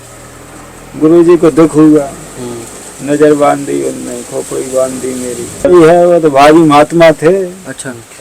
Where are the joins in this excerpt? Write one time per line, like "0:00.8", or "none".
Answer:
0:05.7